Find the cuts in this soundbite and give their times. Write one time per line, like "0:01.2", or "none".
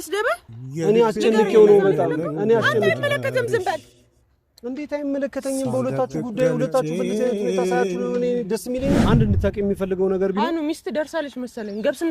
0:09.0